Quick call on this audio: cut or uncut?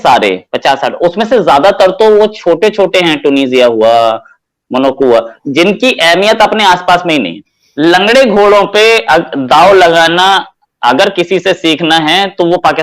cut